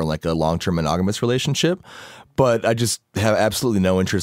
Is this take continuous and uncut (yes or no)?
yes